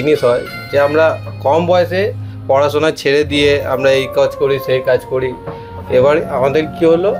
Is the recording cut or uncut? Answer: uncut